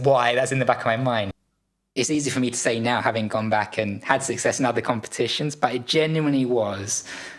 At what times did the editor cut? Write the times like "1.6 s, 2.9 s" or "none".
1.3 s